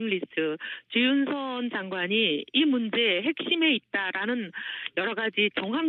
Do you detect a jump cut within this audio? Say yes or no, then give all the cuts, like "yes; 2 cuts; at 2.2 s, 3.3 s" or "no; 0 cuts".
no; 0 cuts